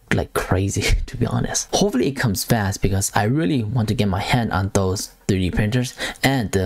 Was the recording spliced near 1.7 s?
yes; 1 cut; at 1.7 s

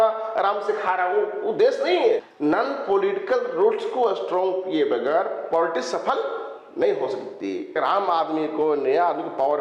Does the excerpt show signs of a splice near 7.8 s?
yes; 2 cuts; at 2.2 s, 7.8 s

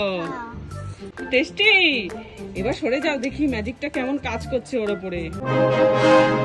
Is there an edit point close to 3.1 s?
no; 2 cuts; at 1.1 s, 5.4 s

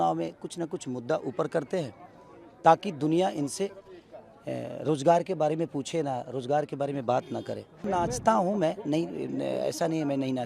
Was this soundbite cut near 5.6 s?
no; 1 cut; at 7.9 s

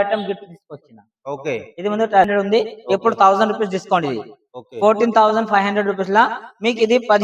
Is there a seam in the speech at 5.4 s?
no; 1 cut; at 2.3 s

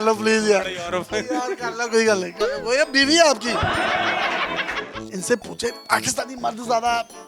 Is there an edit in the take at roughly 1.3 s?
no; 1 cut; at 5.1 s

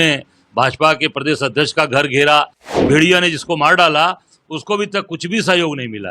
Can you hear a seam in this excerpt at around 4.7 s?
no; 1 cut; at 2.8 s

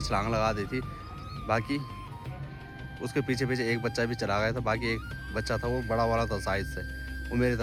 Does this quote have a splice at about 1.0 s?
no; 0 cuts

